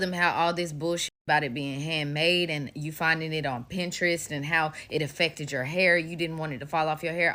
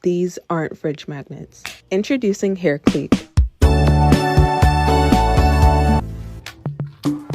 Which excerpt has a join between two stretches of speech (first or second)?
second